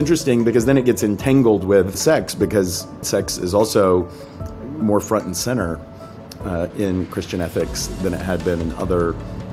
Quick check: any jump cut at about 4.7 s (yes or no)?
no